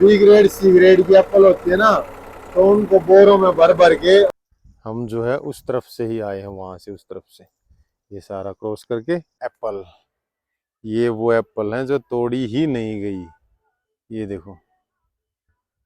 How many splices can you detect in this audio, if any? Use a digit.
2